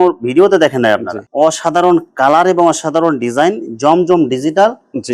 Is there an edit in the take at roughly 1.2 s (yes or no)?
yes